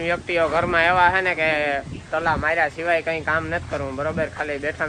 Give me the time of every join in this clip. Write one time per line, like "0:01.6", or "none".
none